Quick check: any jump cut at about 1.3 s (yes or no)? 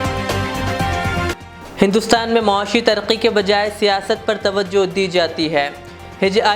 yes